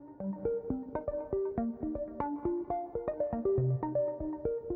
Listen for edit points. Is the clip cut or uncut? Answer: uncut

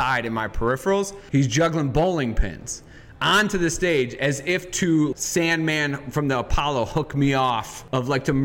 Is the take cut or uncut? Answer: cut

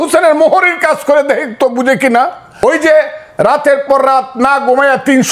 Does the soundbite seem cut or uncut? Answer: cut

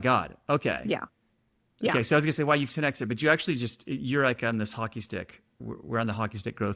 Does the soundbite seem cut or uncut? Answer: cut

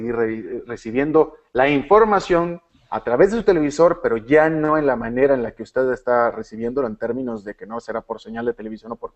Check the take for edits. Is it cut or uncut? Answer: cut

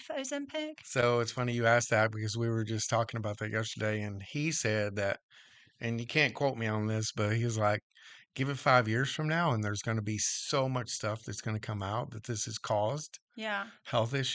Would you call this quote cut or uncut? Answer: uncut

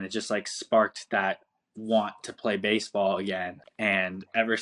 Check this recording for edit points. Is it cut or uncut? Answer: uncut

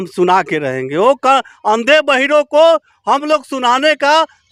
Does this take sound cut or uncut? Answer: uncut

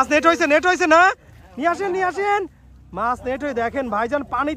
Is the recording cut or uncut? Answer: uncut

